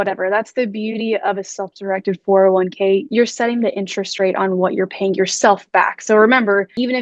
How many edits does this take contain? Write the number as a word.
one